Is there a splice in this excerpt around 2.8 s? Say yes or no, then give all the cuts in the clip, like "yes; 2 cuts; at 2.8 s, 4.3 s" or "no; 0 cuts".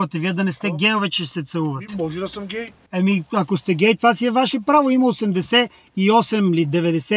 yes; 1 cut; at 2.8 s